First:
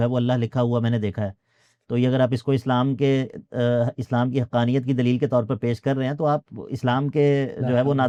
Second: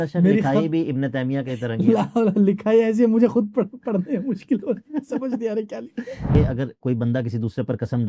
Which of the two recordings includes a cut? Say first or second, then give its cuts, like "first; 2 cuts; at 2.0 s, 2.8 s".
second; 1 cut; at 6.3 s